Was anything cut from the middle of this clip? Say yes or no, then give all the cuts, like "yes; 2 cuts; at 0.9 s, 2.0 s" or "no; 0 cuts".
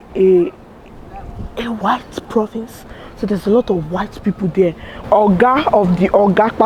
yes; 1 cut; at 5.0 s